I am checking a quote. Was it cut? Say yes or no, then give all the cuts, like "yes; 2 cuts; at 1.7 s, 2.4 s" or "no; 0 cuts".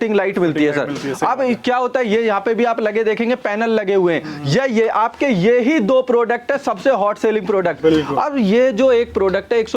no; 0 cuts